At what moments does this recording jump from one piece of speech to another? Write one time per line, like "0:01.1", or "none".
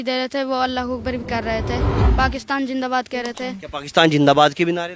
0:02.0